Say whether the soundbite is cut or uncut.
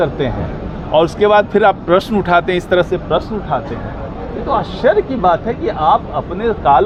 uncut